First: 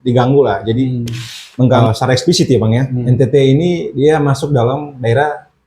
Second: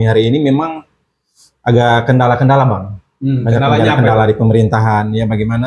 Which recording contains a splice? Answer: first; 1 cut; at 1.7 s

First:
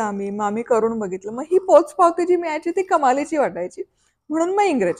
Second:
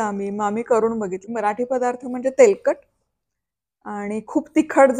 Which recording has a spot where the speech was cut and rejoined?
second; 1 cut; at 1.2 s

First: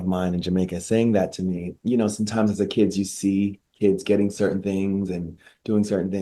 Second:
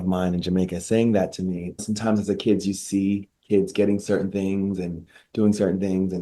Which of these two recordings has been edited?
second; 1 cut; at 1.8 s

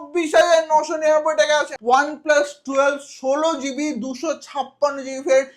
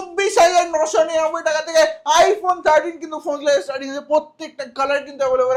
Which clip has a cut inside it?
first; 1 cut; at 1.7 s

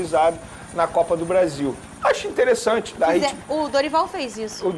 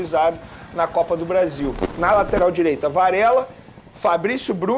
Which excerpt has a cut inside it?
second; 1 cut; at 1.8 s

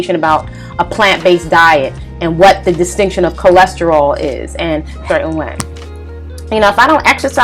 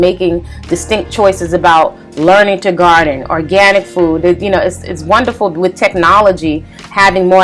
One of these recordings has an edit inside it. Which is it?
first; 1 cut; at 5.0 s

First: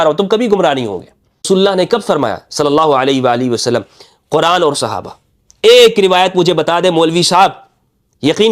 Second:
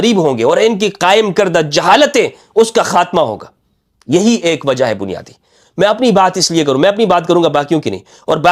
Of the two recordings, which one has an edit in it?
first; 1 cut; at 1.4 s

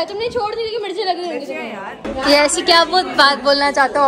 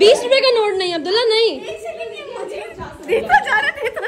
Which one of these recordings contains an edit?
first; 1 cut; at 2.0 s

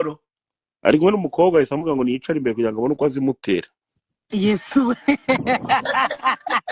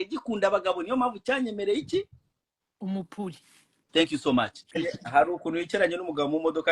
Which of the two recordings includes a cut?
second; 1 cut; at 4.8 s

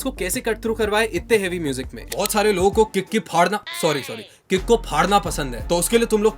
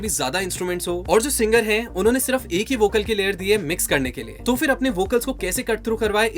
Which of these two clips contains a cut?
first; 1 cut; at 2.1 s

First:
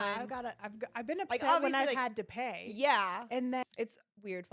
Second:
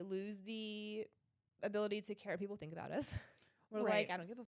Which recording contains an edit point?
first; 1 cut; at 3.6 s

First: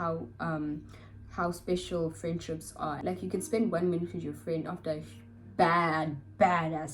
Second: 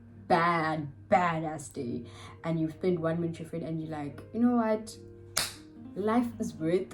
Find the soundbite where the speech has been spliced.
first; 1 cut; at 3.0 s

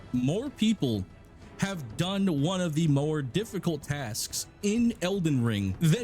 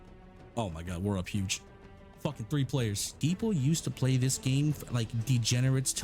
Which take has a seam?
second; 1 cut; at 3.1 s

